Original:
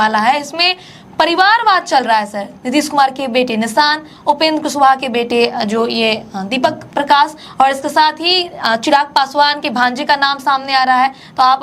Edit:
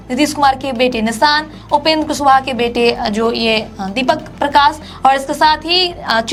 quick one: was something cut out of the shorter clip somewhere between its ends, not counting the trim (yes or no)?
no